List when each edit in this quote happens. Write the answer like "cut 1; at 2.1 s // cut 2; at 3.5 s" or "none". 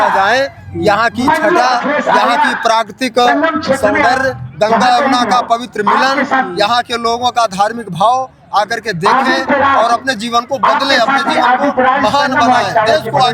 none